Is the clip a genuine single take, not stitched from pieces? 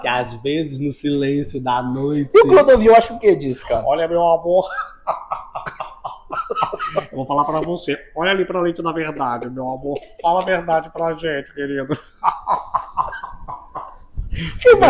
yes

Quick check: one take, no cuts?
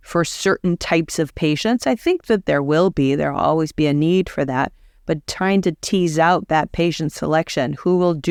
yes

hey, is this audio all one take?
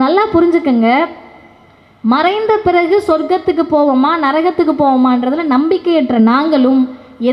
yes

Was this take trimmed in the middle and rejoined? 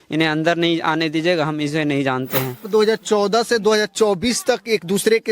yes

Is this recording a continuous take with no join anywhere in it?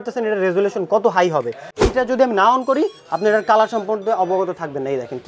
no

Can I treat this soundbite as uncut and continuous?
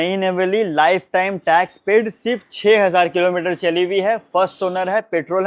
yes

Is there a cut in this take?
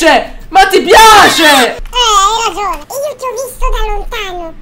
yes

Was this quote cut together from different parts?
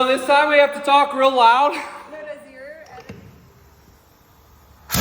yes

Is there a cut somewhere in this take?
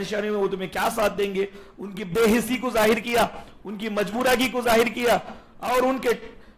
no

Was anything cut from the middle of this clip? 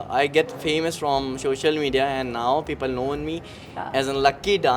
no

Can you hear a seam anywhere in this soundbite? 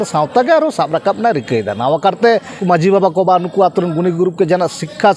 yes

